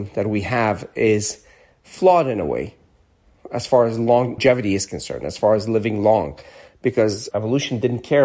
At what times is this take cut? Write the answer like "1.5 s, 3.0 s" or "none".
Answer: 4.4 s, 7.2 s